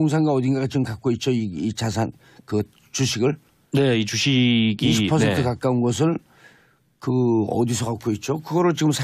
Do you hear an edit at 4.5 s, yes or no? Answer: no